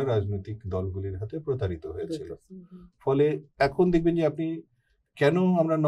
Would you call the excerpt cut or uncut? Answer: uncut